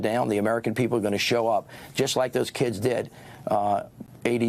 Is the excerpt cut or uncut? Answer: uncut